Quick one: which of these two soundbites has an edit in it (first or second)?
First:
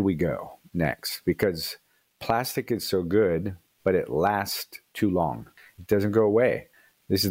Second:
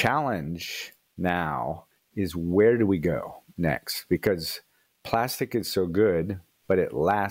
first